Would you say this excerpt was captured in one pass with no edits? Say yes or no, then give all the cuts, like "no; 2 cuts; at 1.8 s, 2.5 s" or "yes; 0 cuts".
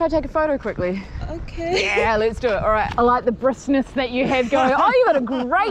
no; 1 cut; at 2.9 s